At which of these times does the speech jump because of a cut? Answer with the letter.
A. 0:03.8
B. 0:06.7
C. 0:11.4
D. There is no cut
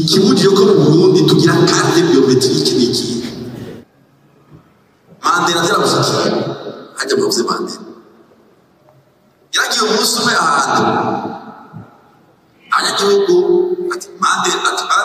A